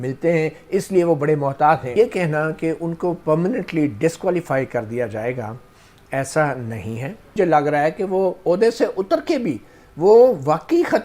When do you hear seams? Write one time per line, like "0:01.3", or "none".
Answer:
0:01.9
0:07.3